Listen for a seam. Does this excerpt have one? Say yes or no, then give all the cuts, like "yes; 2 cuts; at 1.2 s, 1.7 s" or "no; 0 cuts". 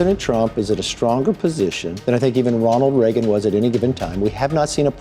yes; 1 cut; at 1.9 s